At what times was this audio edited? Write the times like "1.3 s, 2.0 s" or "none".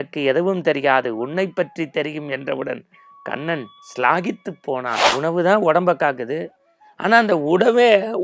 5.1 s

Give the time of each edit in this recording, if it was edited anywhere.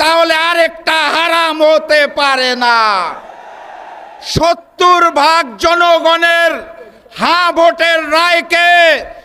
none

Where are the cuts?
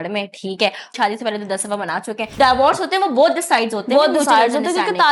0.9 s, 2.3 s

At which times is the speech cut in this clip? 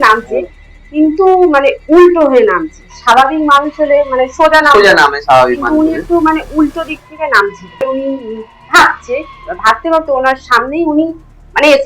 7.8 s

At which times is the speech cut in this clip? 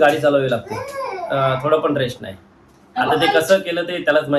none

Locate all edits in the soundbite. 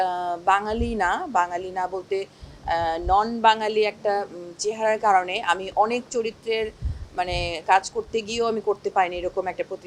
none

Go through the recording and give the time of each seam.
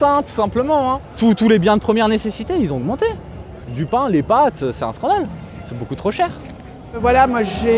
1.1 s, 7.0 s

